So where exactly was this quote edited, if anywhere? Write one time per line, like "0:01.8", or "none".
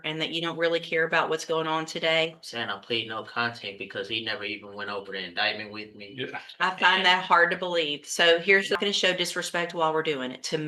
0:08.8